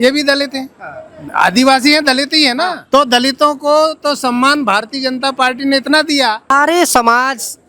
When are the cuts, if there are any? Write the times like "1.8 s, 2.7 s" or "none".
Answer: 2.8 s, 6.5 s